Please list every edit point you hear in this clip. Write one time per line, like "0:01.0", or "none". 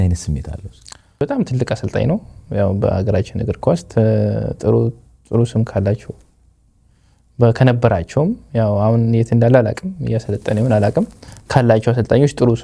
0:01.2